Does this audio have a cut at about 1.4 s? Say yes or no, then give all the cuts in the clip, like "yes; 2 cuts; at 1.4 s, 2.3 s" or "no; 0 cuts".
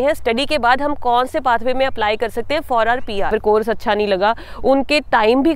no; 1 cut; at 3.3 s